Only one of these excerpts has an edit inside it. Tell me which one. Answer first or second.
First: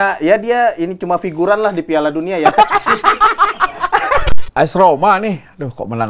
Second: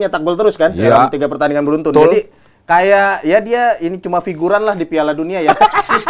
first